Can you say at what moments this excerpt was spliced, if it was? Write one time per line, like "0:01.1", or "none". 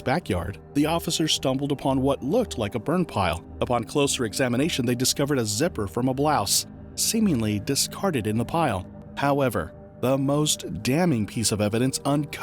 0:09.0